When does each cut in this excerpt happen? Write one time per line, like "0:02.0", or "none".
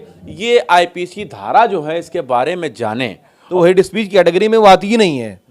0:03.4